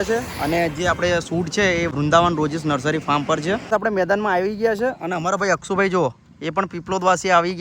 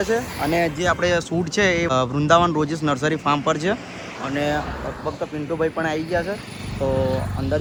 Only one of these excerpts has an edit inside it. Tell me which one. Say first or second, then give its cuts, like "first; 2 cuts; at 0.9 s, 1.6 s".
first; 2 cuts; at 1.9 s, 3.7 s